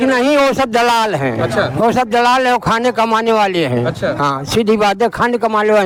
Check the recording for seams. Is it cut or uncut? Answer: uncut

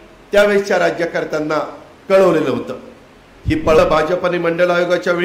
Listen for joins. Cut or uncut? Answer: cut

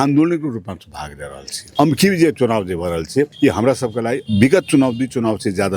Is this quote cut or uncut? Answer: cut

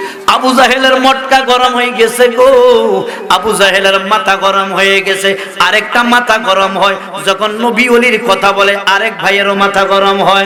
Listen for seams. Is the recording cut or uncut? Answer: uncut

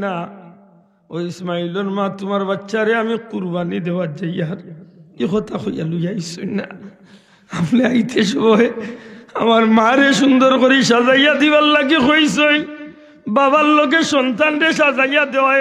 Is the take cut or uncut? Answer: uncut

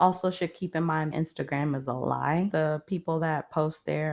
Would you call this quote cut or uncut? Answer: cut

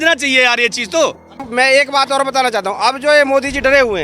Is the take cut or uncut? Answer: cut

